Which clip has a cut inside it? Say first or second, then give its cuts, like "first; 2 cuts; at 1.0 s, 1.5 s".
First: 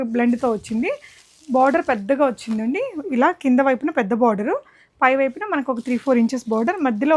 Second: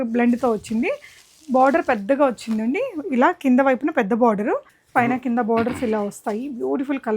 second; 1 cut; at 4.8 s